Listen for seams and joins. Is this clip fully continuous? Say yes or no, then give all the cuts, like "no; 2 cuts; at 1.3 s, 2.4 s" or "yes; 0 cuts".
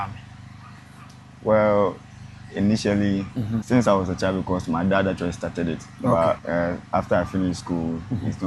no; 2 cuts; at 3.6 s, 6.4 s